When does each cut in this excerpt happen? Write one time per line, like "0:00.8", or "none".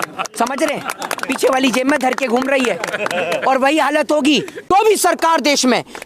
0:04.7